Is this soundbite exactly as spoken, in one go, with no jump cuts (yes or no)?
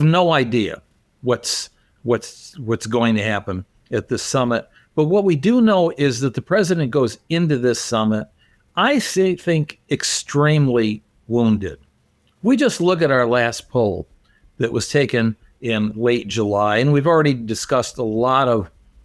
yes